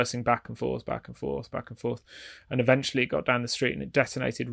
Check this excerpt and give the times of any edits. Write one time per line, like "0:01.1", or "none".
none